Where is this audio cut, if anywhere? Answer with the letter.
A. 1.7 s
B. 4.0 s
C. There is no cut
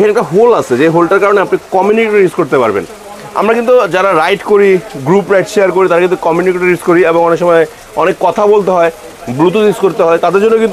C